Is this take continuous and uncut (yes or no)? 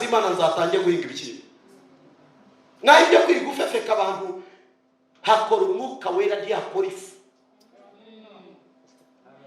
yes